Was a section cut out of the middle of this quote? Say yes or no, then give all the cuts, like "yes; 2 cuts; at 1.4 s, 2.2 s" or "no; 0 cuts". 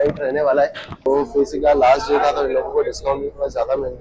yes; 1 cut; at 1.1 s